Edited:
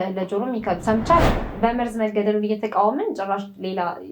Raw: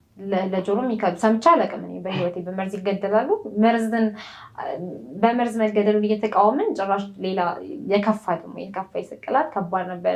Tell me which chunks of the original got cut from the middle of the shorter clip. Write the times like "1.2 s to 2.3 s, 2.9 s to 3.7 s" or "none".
1.8 s to 5.1 s